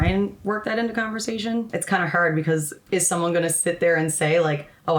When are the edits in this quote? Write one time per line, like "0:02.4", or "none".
0:01.7
0:02.8